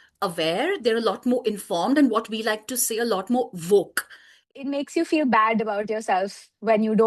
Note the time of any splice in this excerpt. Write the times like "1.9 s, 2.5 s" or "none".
4.4 s